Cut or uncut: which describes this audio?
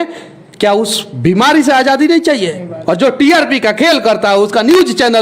cut